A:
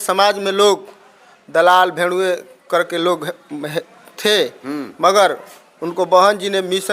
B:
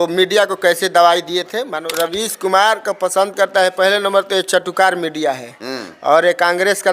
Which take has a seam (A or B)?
B